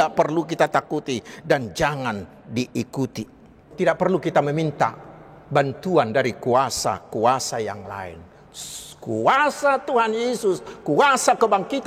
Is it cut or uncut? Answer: cut